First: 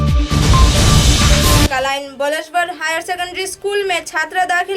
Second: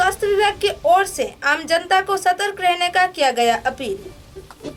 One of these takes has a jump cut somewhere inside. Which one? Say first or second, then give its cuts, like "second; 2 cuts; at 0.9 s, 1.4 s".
first; 1 cut; at 1.6 s